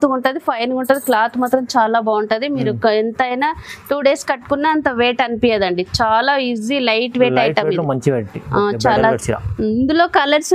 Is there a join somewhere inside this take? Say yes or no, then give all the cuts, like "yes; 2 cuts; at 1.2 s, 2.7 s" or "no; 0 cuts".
no; 0 cuts